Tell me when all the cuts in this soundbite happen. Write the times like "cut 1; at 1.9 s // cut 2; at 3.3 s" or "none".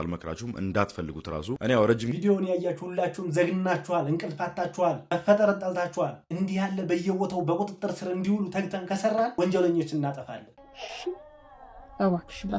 cut 1; at 2.1 s // cut 2; at 10.4 s